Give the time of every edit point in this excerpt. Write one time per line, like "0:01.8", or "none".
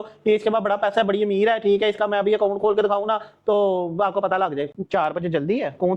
0:04.7